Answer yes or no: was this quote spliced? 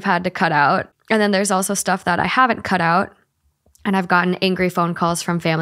no